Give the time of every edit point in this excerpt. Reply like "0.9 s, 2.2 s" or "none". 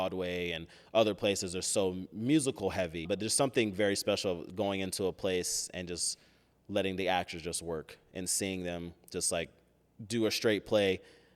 3.0 s

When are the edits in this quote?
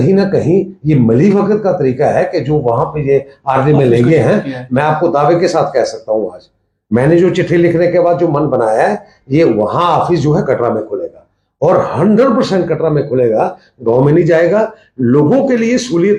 none

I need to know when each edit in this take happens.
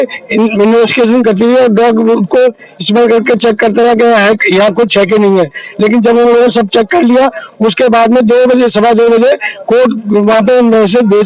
none

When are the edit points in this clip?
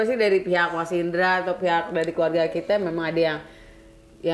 none

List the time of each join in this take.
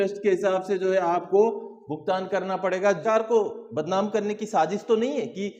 3.0 s

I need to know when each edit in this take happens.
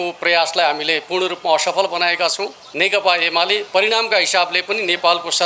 2.6 s

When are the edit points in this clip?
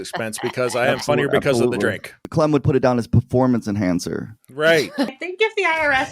2.3 s, 5.2 s

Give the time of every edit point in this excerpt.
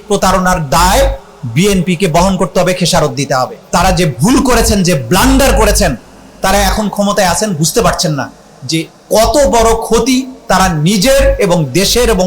3.6 s

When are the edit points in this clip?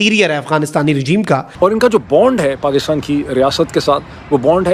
1.5 s

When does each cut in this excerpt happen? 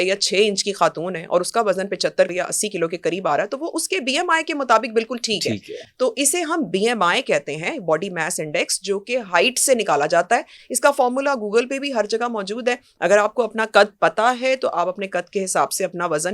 2.3 s

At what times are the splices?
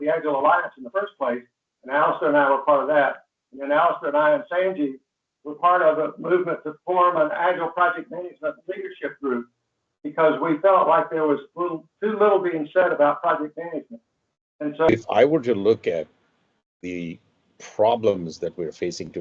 14.9 s

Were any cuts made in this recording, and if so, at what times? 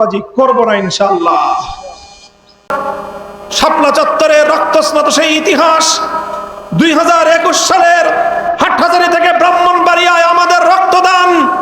2.7 s

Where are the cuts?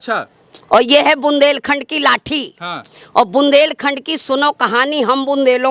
none

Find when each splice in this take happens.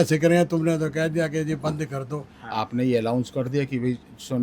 2.3 s

